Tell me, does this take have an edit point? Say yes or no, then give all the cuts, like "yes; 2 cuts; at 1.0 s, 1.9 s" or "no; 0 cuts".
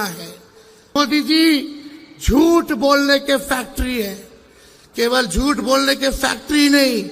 yes; 1 cut; at 1.0 s